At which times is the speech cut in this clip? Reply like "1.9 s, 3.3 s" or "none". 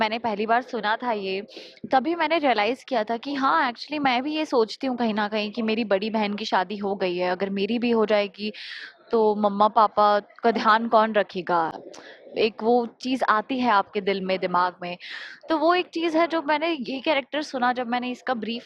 none